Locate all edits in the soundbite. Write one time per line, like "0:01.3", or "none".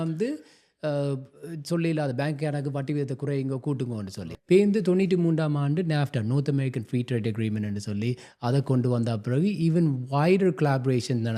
0:04.3